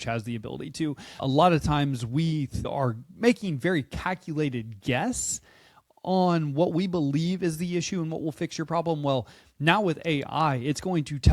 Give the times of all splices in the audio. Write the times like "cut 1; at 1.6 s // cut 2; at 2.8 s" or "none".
cut 1; at 1.2 s // cut 2; at 2.7 s